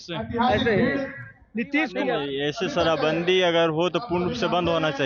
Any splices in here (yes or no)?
yes